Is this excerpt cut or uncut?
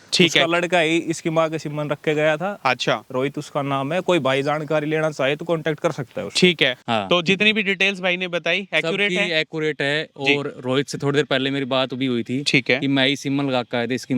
cut